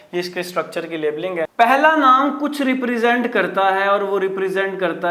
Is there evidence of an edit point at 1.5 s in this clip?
yes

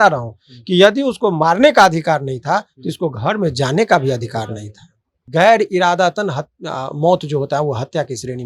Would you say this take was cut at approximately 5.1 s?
yes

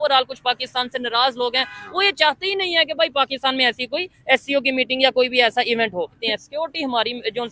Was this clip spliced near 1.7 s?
no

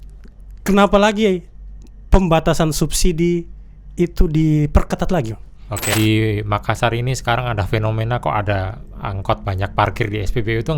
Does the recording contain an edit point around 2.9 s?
no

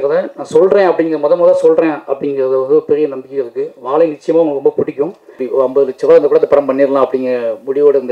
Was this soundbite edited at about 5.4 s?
yes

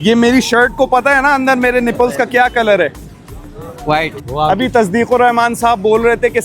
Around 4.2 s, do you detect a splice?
yes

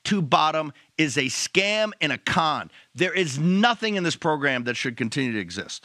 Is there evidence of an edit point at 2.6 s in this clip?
no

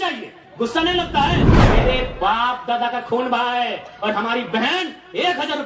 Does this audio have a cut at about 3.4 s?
no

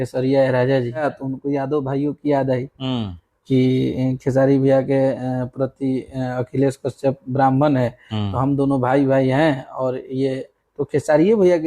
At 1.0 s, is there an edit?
yes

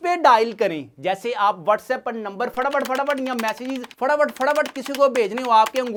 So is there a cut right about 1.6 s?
no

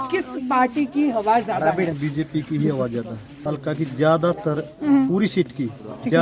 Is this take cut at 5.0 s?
no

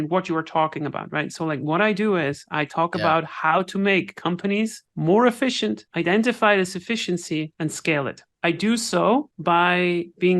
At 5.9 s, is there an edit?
yes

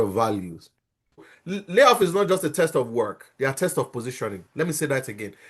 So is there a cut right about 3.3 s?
no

